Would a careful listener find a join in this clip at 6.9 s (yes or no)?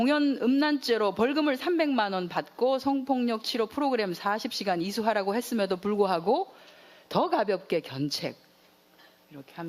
no